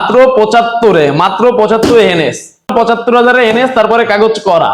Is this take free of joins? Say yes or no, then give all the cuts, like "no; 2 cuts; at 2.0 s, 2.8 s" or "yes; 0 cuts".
no; 1 cut; at 2.7 s